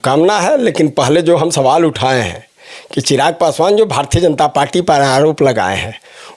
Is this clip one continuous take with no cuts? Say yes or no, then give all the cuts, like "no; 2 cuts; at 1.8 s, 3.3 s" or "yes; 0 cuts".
yes; 0 cuts